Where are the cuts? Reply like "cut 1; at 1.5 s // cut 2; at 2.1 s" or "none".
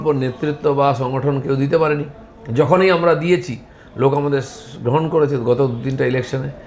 none